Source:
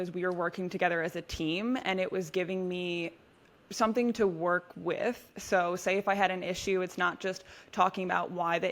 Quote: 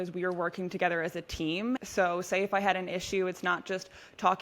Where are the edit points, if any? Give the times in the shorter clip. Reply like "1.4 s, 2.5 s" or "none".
1.8 s